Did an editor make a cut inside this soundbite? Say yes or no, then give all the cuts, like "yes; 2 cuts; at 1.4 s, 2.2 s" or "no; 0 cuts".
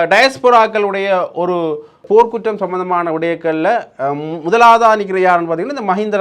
yes; 1 cut; at 2.0 s